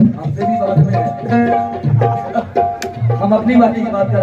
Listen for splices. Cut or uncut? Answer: uncut